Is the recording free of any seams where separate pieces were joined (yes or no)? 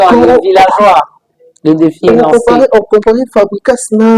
yes